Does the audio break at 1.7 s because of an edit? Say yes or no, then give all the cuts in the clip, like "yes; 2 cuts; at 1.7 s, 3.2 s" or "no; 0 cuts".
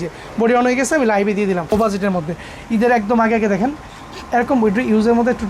yes; 1 cut; at 1.7 s